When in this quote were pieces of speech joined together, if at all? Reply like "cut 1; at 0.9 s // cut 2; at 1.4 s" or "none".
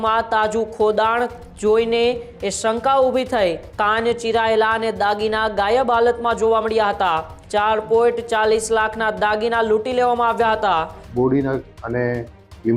cut 1; at 3.7 s // cut 2; at 7.3 s // cut 3; at 11.0 s